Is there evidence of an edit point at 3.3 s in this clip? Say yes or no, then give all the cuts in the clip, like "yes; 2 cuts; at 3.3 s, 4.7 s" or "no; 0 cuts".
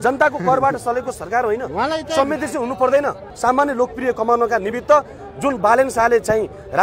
yes; 1 cut; at 3.3 s